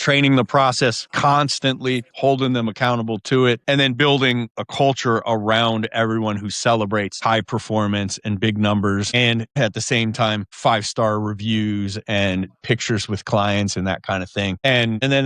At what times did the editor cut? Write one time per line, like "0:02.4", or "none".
0:02.1
0:03.6
0:04.6
0:09.5